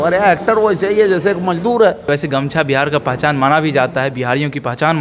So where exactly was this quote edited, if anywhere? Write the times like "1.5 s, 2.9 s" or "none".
2.1 s